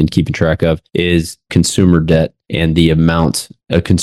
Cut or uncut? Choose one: uncut